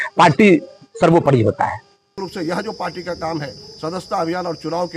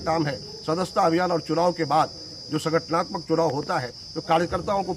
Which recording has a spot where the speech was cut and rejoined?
first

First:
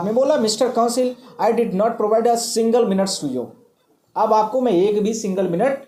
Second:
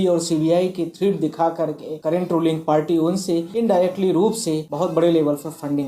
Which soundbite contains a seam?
second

